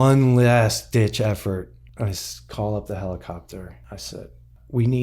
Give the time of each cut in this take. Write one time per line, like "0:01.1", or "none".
0:01.8
0:04.1

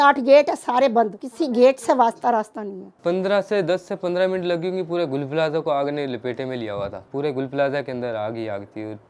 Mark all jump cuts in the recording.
0:03.0
0:07.0

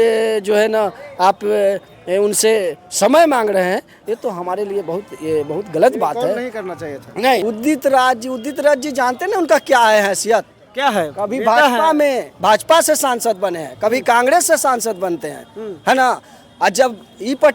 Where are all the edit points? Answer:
0:07.4

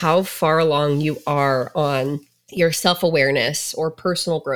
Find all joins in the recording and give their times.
none

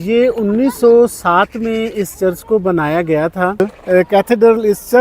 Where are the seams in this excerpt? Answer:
0:03.6

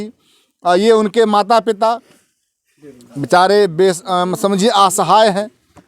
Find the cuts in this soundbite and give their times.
none

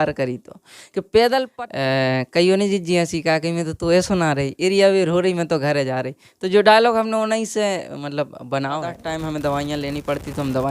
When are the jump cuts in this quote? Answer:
0:01.5
0:09.0

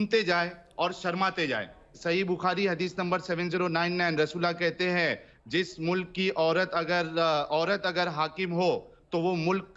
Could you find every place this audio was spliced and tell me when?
0:02.0

